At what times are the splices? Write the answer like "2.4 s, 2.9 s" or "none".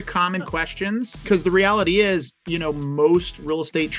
1.2 s